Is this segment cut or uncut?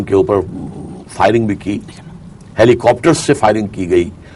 uncut